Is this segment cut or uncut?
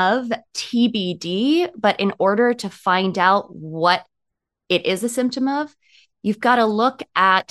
uncut